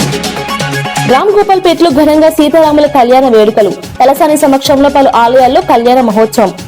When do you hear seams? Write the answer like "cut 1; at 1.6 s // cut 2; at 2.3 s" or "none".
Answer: cut 1; at 1.0 s